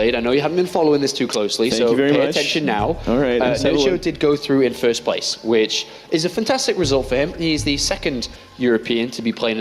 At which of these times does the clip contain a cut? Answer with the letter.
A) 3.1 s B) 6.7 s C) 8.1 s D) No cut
C